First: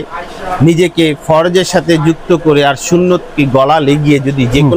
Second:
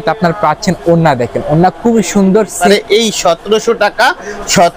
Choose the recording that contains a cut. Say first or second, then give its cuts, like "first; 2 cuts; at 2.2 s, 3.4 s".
second; 1 cut; at 2.6 s